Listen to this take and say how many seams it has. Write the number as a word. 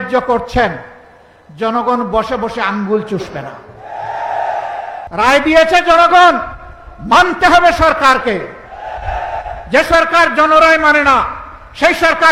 one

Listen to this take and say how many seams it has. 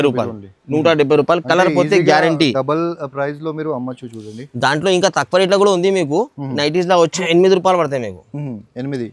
one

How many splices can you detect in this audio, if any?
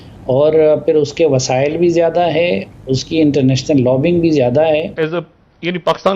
one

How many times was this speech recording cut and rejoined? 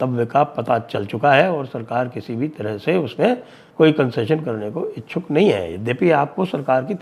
one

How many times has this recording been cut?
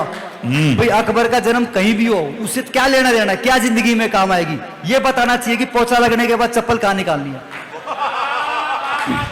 zero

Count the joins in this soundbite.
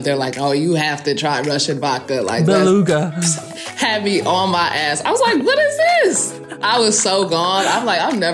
one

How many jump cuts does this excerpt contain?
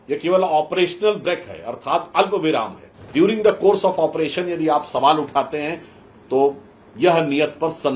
one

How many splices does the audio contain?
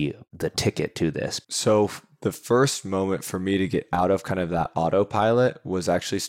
one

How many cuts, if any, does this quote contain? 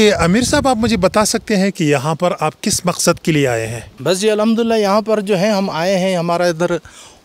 zero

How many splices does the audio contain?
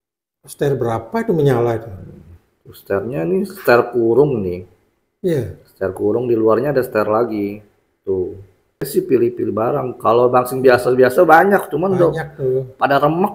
one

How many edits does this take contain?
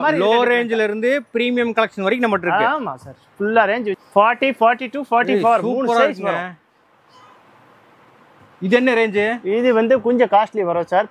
one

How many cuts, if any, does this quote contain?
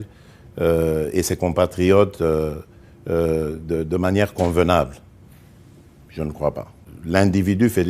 one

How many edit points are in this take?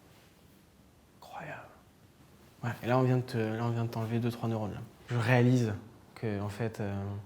one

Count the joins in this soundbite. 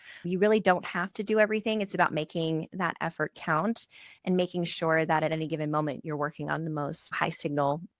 zero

